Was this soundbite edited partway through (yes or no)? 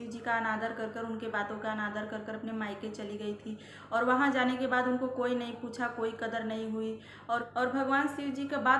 no